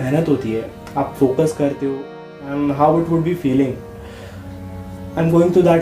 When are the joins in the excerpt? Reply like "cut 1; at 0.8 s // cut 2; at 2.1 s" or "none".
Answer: cut 1; at 2.1 s

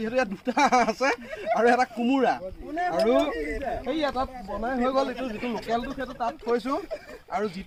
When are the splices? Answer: none

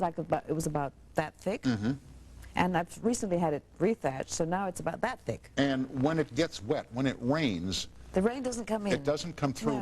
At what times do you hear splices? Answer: cut 1; at 2.8 s

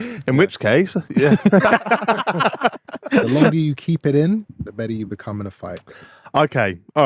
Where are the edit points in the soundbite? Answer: cut 1; at 1.6 s // cut 2; at 3.5 s // cut 3; at 4.5 s

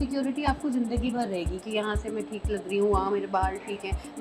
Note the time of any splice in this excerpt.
none

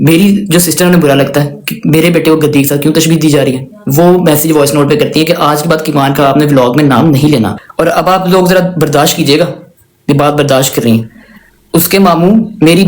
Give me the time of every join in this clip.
cut 1; at 7.6 s

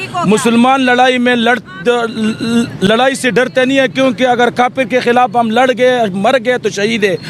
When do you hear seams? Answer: none

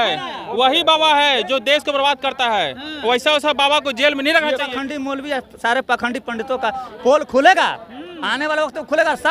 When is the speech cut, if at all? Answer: cut 1; at 4.7 s

